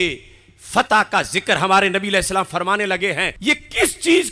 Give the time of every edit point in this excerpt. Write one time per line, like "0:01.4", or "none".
0:03.3